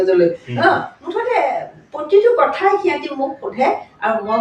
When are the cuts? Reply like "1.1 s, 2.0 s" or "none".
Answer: none

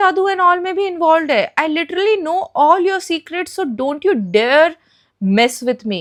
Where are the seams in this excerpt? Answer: none

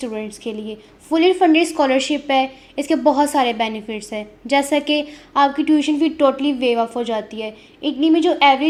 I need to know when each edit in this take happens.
none

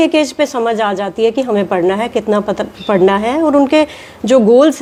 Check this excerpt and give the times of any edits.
none

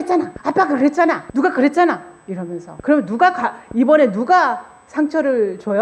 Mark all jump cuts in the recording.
none

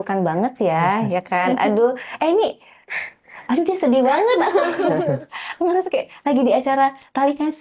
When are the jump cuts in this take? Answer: none

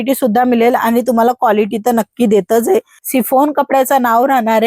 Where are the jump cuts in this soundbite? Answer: 3.0 s

